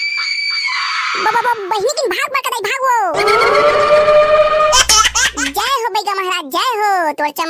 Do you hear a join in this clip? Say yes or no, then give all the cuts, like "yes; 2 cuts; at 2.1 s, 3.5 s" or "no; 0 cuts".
yes; 1 cut; at 4.8 s